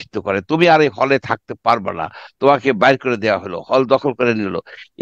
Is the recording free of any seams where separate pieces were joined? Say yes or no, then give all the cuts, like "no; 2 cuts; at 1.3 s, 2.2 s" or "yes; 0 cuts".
yes; 0 cuts